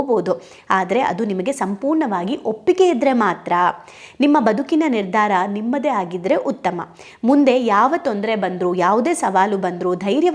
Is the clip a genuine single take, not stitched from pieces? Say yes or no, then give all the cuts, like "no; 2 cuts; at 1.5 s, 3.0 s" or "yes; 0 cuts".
yes; 0 cuts